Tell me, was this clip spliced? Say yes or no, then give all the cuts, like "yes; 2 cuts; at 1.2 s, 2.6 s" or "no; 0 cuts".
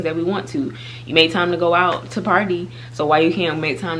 no; 0 cuts